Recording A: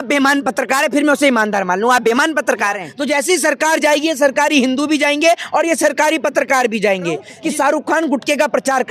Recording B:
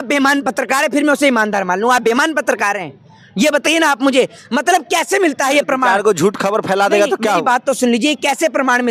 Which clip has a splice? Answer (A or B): A